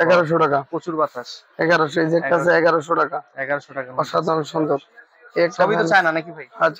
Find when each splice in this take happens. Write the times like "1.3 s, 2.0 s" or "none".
none